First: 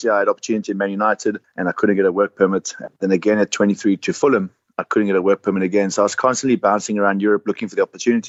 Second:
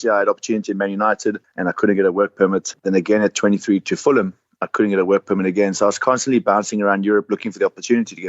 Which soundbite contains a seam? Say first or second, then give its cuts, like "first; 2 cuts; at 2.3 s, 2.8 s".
second; 1 cut; at 2.7 s